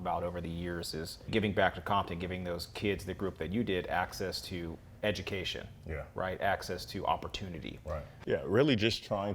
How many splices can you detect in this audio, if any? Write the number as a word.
three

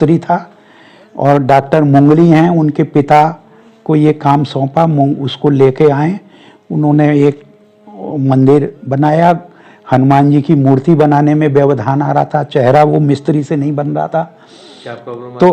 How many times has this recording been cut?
zero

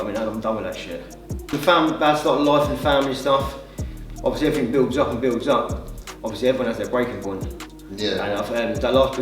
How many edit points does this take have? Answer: one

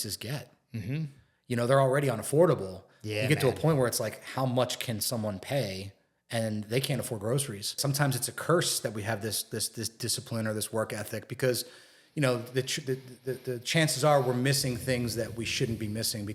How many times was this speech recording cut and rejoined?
one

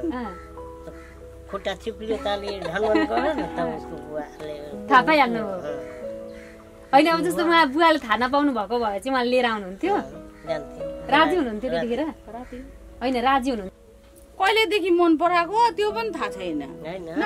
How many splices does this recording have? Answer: one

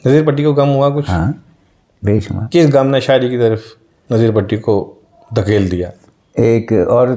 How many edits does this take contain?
zero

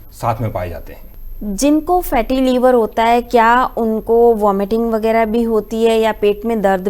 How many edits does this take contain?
zero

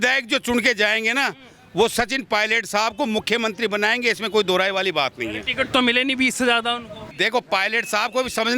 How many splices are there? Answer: one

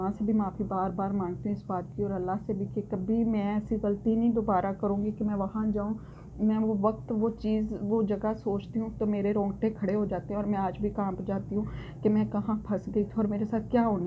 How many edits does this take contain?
zero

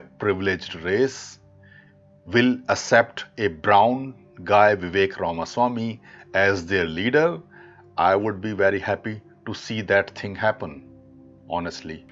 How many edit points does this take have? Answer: zero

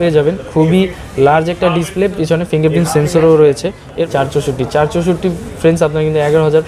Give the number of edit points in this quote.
one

